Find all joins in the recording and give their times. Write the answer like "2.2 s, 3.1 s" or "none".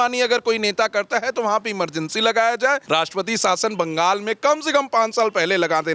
2.8 s